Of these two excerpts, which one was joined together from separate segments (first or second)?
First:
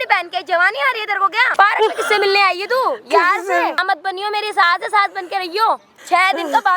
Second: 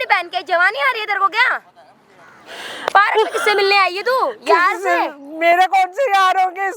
first